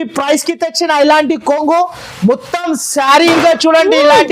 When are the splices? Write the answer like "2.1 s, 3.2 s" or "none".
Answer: 3.3 s